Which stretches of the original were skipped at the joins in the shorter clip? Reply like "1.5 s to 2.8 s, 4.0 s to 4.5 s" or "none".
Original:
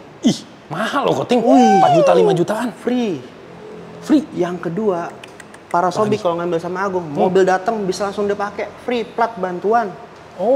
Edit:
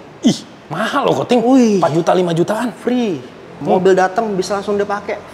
3.6 s to 7.1 s